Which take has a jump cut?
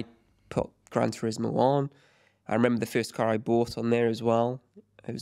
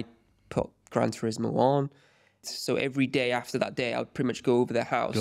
second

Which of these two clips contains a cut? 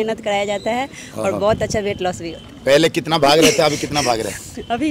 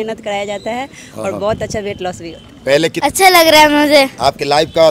second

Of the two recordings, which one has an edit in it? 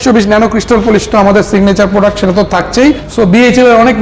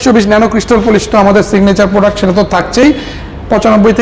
first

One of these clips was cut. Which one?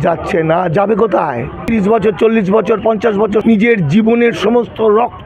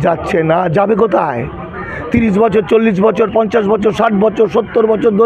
first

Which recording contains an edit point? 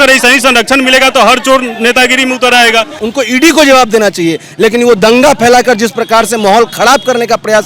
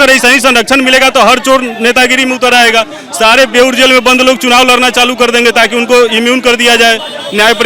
first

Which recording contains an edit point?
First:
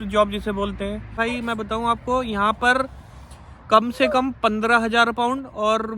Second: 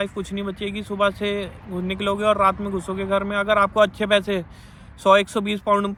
first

